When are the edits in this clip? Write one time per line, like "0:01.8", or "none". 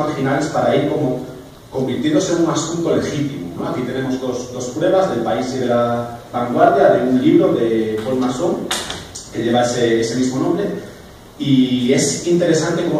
none

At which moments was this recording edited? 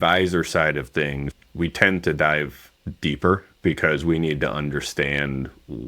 0:01.2

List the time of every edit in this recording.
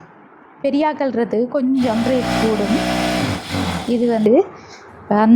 0:04.2

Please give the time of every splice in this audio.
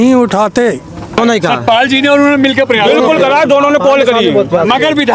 0:01.2

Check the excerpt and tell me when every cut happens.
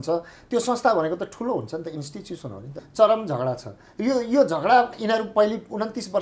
0:02.8

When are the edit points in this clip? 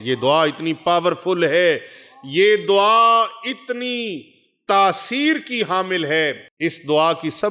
0:06.5

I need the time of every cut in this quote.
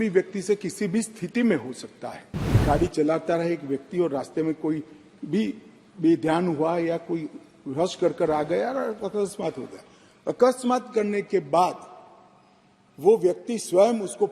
0:02.6

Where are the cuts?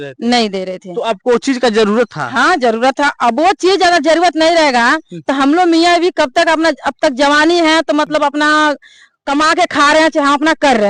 none

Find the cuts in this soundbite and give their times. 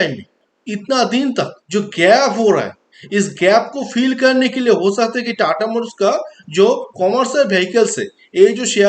0:01.6

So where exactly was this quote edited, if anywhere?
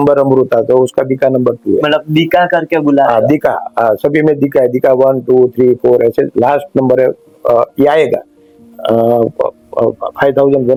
none

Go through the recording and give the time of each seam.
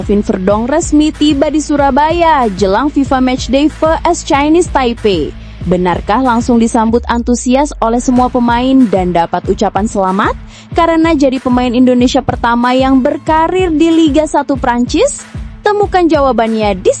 none

